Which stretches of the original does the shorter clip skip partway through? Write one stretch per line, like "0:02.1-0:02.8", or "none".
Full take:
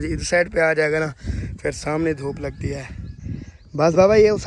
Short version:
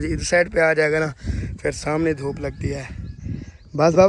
none